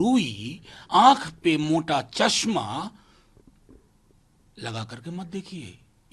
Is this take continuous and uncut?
yes; 0 cuts

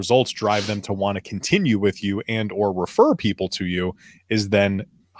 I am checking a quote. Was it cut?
no; 0 cuts

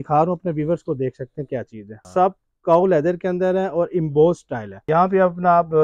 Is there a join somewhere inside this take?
yes; 2 cuts; at 2.0 s, 4.7 s

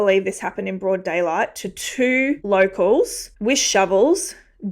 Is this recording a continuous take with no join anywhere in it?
yes; 0 cuts

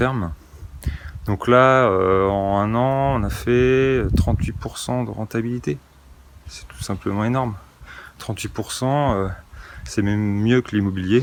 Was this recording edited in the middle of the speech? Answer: no; 0 cuts

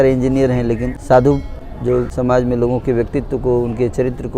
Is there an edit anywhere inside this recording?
yes; 2 cuts; at 0.9 s, 2.1 s

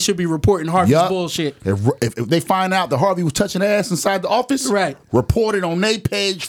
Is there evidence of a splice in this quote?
no; 0 cuts

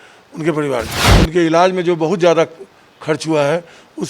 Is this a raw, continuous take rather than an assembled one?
no; 1 cut; at 1.0 s

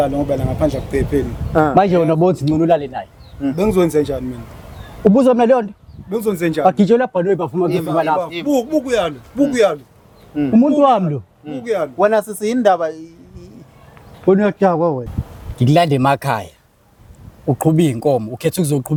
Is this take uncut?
yes; 0 cuts

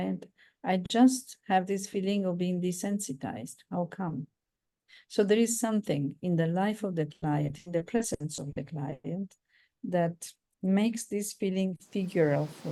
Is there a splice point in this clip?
no; 0 cuts

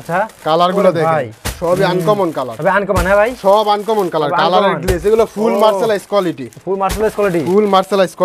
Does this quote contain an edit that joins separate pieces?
no; 0 cuts

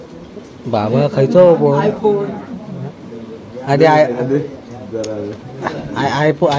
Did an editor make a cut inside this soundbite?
no; 0 cuts

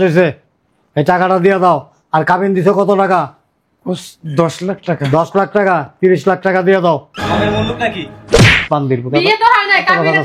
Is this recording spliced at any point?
no; 0 cuts

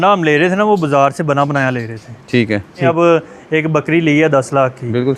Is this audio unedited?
no; 1 cut; at 2.8 s

